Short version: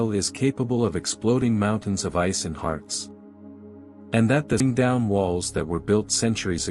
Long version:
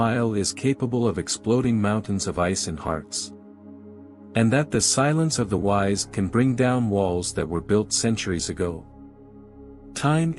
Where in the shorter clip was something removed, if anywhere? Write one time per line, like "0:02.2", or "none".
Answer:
0:04.6

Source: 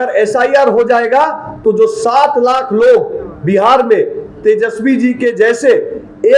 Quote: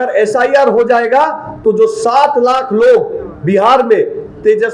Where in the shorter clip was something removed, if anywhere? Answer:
none

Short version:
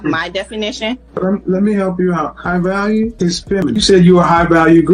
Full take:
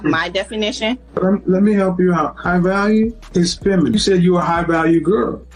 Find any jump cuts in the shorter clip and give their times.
0:03.6

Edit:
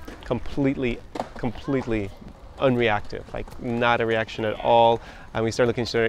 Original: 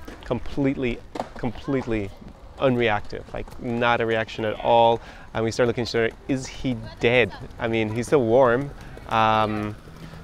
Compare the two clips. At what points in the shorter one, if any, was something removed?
none

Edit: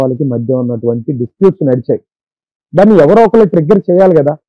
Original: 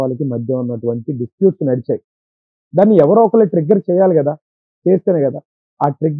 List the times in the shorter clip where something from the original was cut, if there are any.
none

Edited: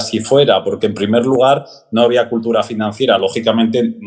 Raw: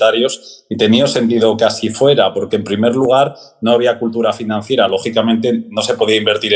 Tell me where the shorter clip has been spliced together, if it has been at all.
none

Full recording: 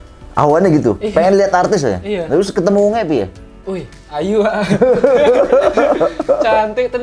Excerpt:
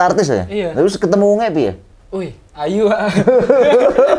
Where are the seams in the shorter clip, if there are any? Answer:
none

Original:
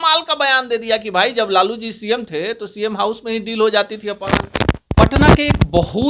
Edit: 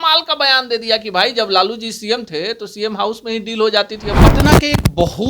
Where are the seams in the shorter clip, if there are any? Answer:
0:04.1

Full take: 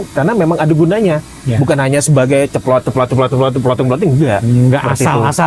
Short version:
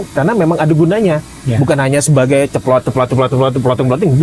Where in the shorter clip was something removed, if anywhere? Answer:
none

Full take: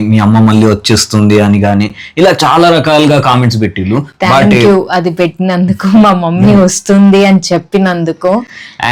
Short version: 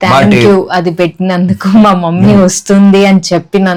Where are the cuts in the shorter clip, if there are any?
none

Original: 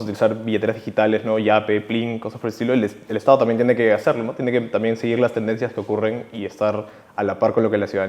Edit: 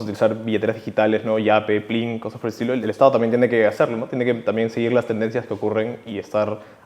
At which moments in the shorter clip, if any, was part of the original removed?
0:02.8

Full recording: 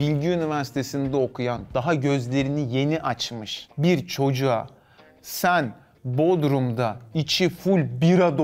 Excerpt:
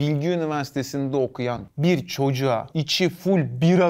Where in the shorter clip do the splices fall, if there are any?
0:01.6
0:02.8

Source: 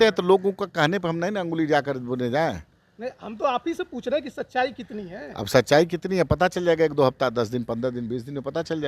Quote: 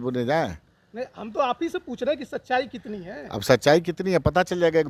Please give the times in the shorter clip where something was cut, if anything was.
none

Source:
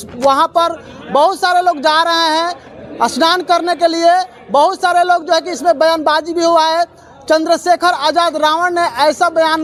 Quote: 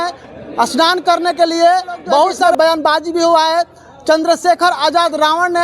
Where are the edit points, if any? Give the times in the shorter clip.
0:02.4

